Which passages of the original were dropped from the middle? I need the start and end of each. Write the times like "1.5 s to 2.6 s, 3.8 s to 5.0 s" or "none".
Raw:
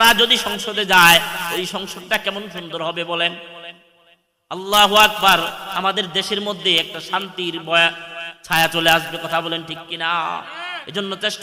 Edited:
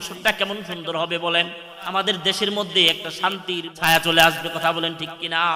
3.6 s to 5.6 s, 7.6 s to 8.4 s